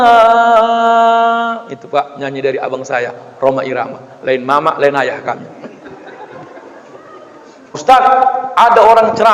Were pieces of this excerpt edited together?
yes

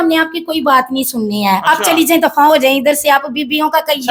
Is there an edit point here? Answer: no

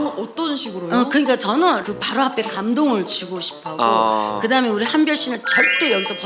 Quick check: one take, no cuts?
no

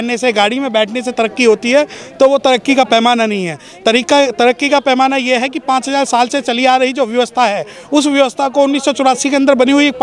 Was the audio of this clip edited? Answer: no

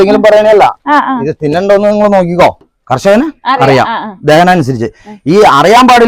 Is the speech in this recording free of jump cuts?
no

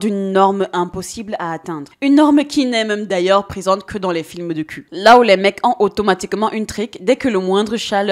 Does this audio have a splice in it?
no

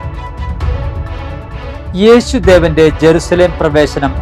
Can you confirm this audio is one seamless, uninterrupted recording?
yes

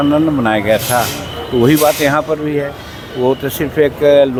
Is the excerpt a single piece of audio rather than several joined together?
yes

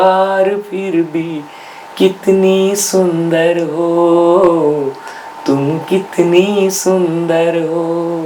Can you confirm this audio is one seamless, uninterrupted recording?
yes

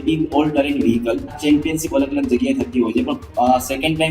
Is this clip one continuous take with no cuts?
no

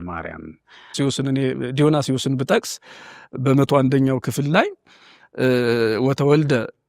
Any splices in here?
yes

